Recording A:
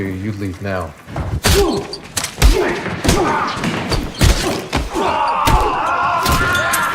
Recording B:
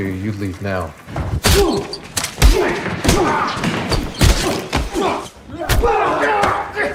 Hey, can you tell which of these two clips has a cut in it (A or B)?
A